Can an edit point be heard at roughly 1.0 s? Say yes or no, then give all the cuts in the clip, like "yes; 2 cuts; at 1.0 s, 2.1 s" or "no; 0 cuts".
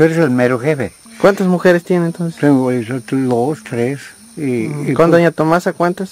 yes; 1 cut; at 1.0 s